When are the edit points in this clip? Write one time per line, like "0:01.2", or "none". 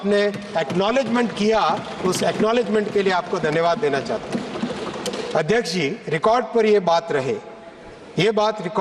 none